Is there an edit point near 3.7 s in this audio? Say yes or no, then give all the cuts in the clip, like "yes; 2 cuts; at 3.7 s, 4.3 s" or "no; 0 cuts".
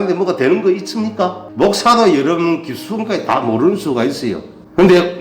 no; 1 cut; at 1.4 s